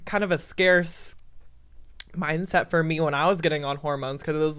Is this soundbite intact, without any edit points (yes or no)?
yes